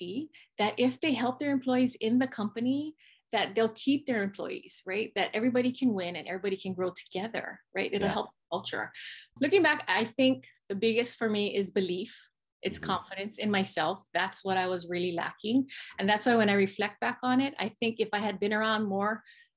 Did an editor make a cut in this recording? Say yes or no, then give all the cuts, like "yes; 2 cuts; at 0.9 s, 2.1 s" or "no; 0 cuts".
yes; 1 cut; at 9.4 s